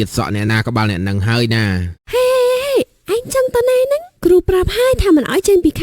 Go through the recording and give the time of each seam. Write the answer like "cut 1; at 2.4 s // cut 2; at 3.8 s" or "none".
cut 1; at 2.0 s